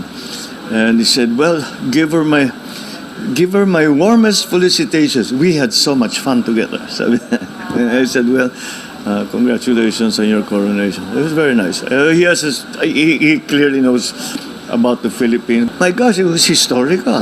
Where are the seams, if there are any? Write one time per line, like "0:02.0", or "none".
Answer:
0:15.7